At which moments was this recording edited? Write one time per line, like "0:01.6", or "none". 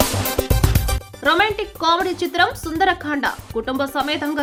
none